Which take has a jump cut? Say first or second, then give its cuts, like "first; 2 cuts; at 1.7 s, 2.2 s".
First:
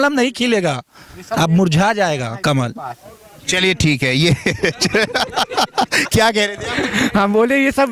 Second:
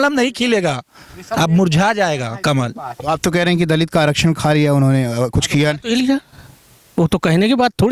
second; 1 cut; at 2.9 s